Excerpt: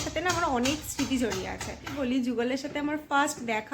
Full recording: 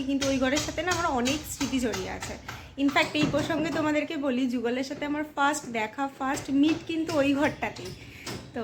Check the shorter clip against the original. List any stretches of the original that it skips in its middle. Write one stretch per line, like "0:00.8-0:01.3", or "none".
0:02.5-0:04.2